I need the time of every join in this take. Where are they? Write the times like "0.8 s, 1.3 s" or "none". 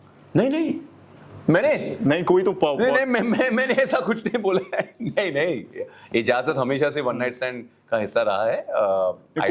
none